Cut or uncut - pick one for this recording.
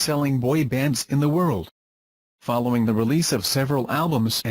cut